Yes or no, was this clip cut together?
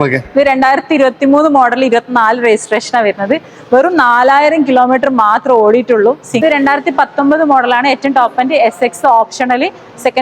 yes